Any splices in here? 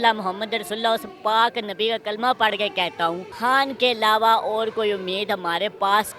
yes; 1 cut; at 3.3 s

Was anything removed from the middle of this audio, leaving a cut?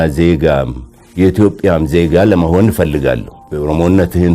yes; 1 cut; at 3.4 s

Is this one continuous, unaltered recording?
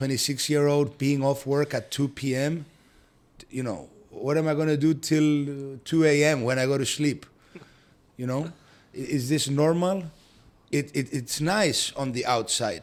yes; 0 cuts

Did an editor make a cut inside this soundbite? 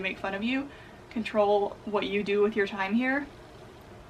no; 0 cuts

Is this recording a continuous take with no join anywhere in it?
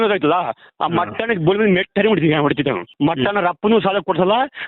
no; 1 cut; at 2.9 s

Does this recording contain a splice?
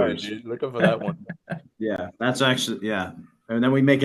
no; 0 cuts

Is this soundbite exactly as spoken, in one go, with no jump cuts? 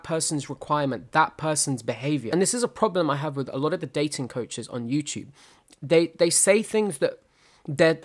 no; 1 cut; at 2.2 s

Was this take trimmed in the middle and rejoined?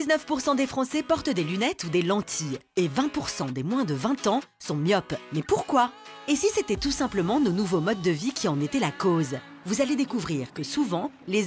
no; 0 cuts

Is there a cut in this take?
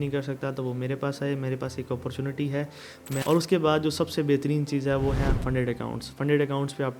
yes; 1 cut; at 3.2 s

